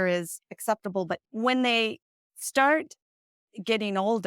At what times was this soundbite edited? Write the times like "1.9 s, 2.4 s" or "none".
1.2 s